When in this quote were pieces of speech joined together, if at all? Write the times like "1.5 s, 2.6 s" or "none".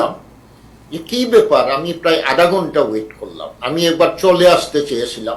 none